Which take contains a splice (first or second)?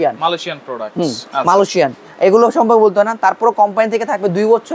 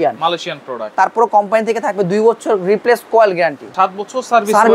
second